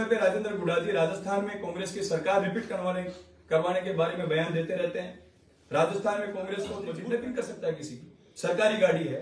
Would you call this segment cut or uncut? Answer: cut